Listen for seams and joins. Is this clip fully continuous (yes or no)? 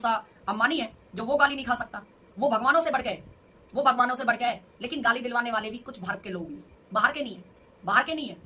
yes